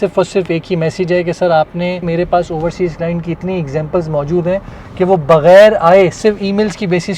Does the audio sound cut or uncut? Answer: cut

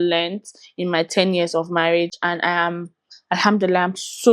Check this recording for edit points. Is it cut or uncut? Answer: uncut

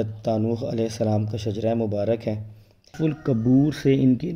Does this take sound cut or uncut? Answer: cut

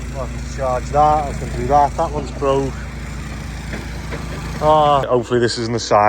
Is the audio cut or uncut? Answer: cut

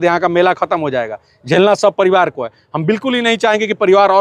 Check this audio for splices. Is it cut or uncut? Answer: uncut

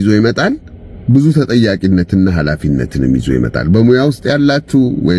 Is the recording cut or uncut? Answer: uncut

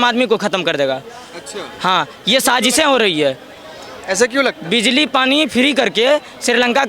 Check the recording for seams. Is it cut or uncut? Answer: uncut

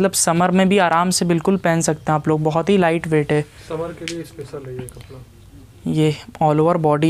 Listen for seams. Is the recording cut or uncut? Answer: uncut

